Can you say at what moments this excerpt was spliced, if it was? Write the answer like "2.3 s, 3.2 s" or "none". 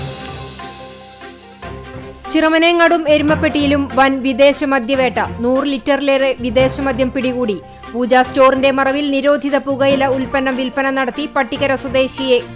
2.0 s